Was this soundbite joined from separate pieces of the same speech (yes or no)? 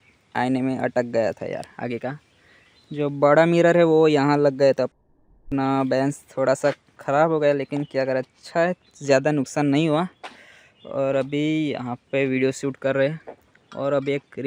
no